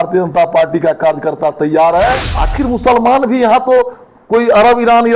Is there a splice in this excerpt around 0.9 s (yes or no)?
no